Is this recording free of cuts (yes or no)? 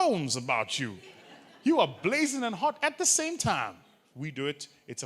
no